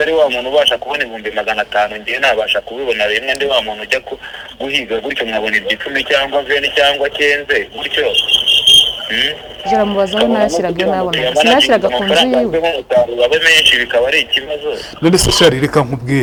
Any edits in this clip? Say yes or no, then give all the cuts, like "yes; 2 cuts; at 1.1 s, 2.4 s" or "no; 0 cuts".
no; 0 cuts